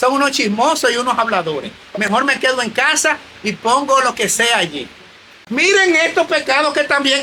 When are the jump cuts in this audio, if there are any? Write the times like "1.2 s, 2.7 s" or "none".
5.4 s